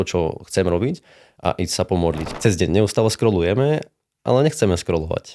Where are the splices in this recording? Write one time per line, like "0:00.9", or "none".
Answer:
0:02.3